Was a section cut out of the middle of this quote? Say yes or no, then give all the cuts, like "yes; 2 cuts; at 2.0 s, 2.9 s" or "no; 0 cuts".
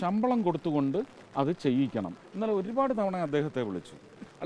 yes; 2 cuts; at 1.2 s, 2.2 s